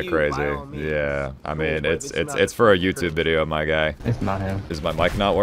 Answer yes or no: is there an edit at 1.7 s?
no